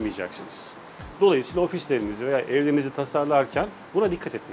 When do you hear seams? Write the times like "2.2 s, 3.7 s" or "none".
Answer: none